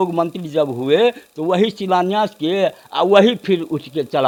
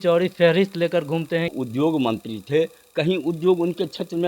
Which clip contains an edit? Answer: second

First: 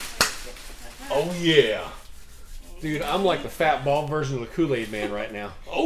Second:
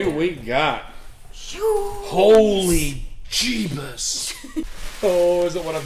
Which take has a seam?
second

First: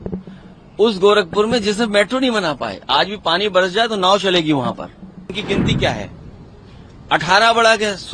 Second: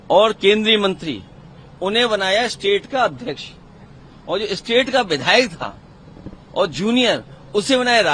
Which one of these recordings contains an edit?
first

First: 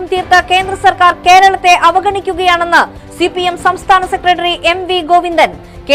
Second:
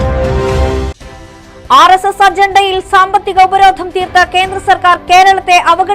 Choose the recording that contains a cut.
second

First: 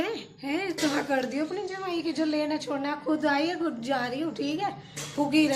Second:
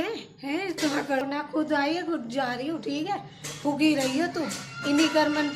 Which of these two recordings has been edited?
second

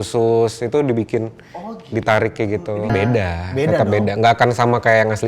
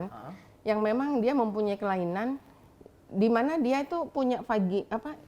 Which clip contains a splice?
first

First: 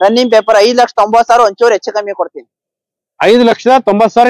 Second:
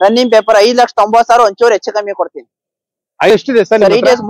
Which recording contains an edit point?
second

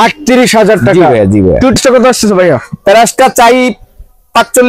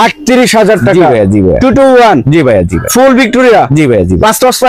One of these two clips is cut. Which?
first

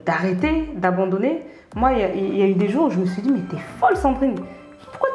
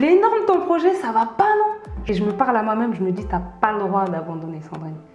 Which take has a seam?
second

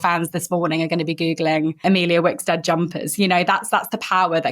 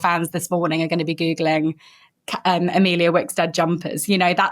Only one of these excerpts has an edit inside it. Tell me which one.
first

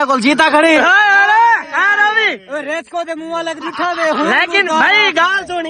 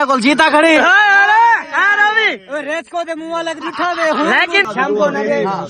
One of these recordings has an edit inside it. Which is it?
second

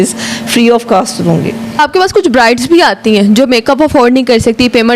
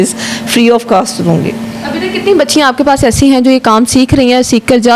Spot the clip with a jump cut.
first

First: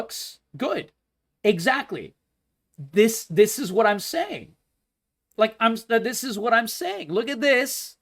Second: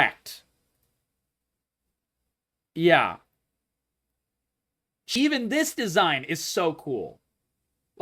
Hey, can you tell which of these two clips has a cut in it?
second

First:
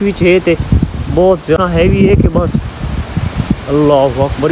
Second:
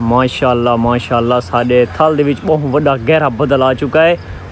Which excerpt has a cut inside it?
first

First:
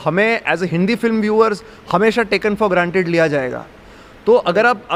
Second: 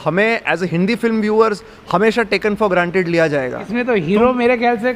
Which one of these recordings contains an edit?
second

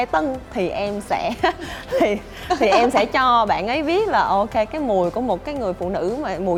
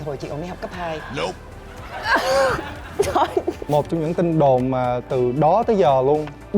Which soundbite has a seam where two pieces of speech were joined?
second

